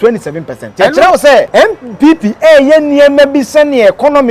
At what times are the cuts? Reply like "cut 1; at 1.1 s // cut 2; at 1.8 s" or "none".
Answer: cut 1; at 1.5 s